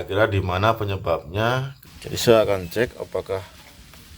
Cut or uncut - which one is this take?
cut